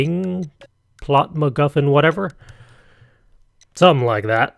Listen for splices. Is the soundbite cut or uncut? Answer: uncut